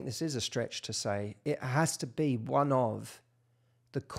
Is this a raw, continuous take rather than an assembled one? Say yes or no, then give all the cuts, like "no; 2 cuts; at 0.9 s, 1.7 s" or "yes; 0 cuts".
no; 1 cut; at 1.4 s